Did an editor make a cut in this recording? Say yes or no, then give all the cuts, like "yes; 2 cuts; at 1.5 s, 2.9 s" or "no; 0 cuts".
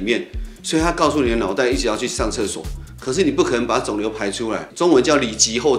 no; 0 cuts